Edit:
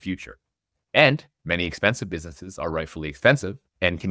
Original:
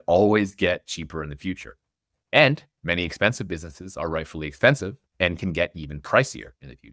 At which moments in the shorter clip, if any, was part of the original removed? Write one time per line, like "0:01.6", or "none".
none

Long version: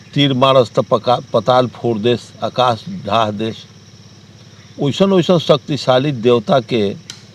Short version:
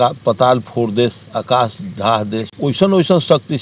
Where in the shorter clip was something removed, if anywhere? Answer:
0:02.5

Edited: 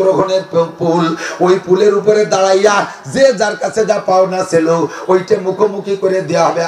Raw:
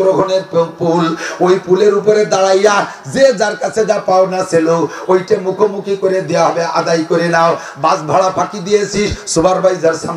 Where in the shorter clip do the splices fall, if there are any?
none

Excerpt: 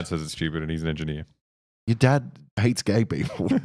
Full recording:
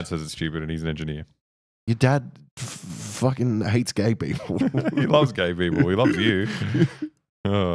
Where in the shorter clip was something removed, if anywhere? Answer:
0:02.6

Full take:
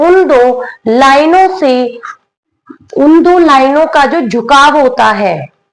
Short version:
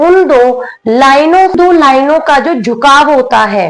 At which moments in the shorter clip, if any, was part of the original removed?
0:01.6

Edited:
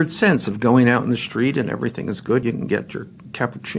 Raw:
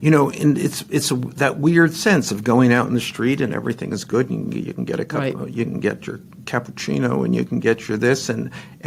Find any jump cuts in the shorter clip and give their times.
0:02.4

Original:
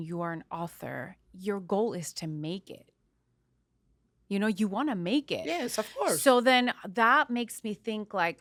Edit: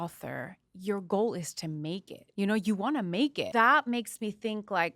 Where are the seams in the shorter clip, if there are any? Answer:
0:02.2
0:03.4

